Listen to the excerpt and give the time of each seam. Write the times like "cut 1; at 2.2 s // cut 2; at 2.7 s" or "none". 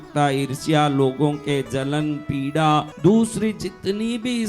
cut 1; at 2.9 s